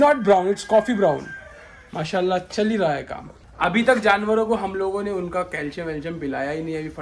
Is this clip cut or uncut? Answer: uncut